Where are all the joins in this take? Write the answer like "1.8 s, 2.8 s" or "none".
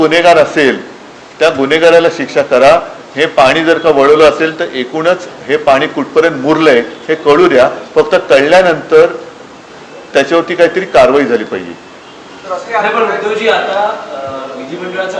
none

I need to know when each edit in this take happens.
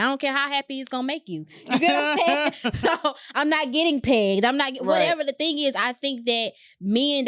none

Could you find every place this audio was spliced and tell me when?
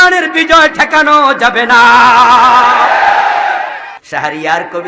3.9 s

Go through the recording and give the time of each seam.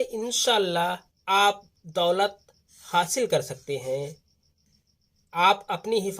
1.1 s

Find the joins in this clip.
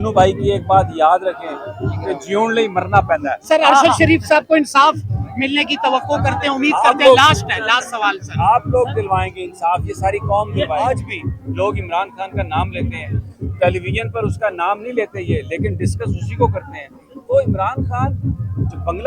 10.8 s

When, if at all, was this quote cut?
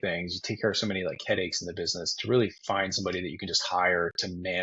none

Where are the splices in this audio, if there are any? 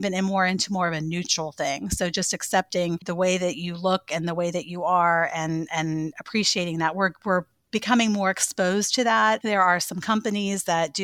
3.0 s, 9.4 s

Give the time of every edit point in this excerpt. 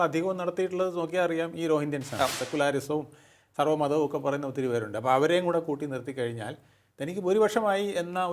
2.3 s

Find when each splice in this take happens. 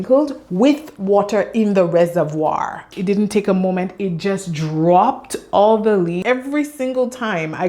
2.9 s, 6.2 s

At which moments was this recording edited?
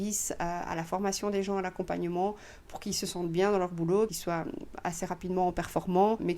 4.2 s

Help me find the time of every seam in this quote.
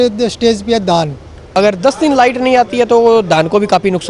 1.4 s

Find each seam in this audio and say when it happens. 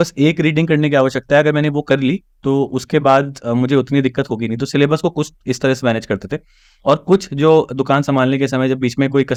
none

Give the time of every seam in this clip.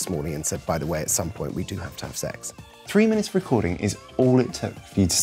2.7 s

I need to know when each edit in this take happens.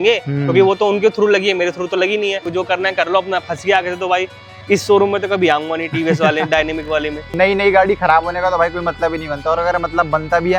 2.5 s, 7.3 s

